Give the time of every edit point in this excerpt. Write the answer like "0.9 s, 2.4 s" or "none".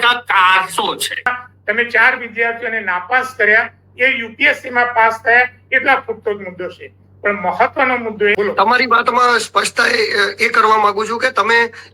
1.3 s, 8.3 s